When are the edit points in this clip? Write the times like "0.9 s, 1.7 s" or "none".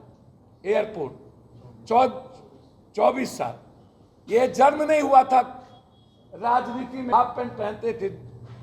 7.1 s